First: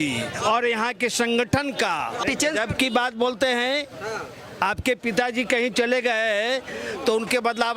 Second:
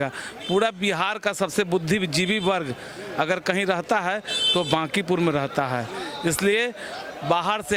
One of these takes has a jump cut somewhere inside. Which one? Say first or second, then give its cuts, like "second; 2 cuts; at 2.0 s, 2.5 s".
first; 1 cut; at 2.2 s